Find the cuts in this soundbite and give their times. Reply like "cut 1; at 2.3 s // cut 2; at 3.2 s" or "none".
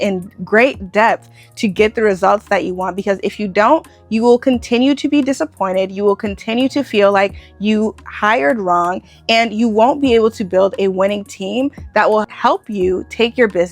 cut 1; at 12.3 s